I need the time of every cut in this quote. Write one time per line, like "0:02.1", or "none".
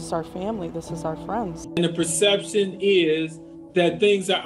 0:01.6